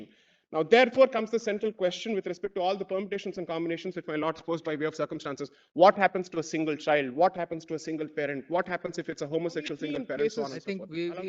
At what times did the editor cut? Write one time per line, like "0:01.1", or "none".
0:10.1